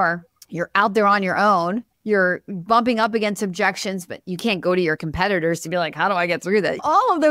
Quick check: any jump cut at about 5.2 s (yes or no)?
no